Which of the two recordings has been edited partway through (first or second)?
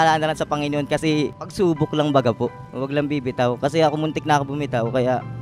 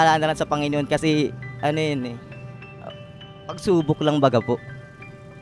first